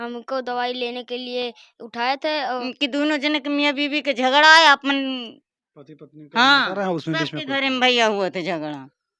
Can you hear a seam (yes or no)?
yes